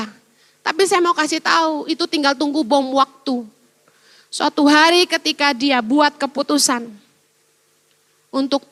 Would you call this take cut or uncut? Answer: uncut